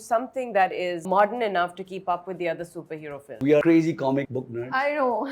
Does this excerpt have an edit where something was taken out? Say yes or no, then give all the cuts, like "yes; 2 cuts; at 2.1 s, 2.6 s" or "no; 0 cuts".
yes; 3 cuts; at 1.0 s, 3.4 s, 4.4 s